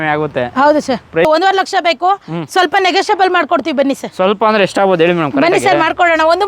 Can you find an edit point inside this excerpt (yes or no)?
yes